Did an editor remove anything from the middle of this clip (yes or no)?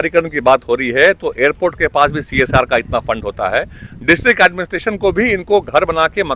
no